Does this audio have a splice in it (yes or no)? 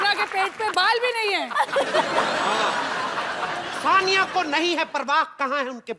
yes